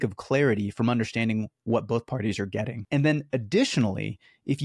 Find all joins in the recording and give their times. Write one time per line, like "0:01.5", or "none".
0:02.8